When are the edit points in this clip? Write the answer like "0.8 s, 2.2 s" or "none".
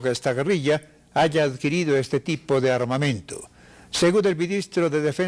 none